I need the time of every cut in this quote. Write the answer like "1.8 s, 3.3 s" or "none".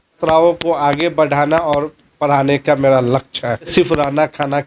3.7 s